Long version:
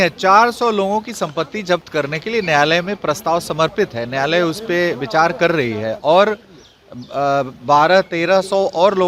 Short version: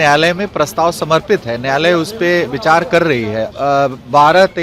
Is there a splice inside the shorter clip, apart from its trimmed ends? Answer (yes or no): yes